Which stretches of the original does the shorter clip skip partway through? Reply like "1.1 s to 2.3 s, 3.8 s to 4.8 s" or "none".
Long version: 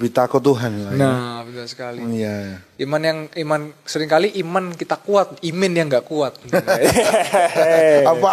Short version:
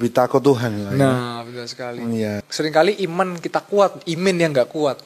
2.4 s to 3.8 s

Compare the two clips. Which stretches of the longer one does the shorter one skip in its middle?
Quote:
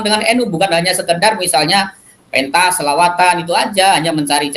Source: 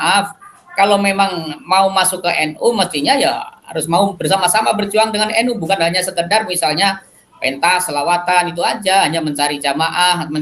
none

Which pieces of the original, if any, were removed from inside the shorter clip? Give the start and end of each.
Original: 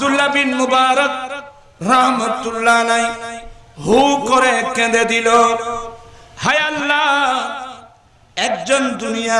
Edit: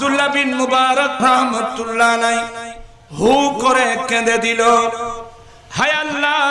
1.1 s to 1.8 s

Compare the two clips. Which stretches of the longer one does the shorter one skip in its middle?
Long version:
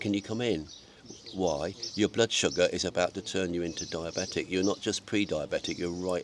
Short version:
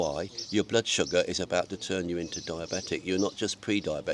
none

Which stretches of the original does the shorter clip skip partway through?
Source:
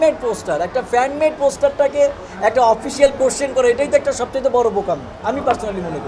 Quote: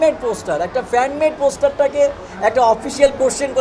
none

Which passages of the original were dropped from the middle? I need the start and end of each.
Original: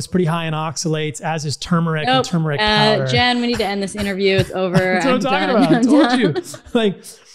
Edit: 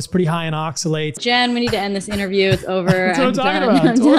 1.2 s to 3.1 s

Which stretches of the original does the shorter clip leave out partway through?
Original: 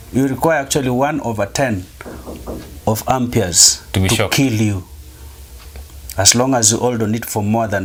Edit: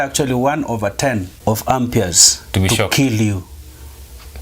1.9 s to 2.7 s

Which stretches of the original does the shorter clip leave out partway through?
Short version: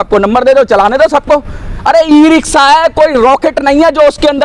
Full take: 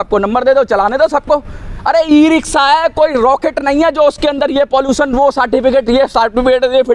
none

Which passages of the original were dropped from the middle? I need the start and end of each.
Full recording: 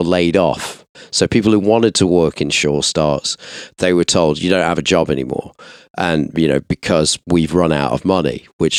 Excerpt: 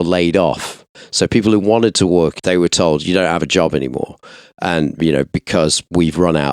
2.4 s to 3.7 s

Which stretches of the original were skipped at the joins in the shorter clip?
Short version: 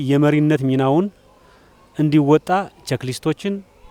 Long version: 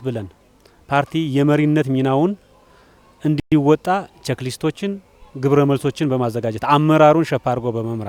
3.4 s to 3.5 s

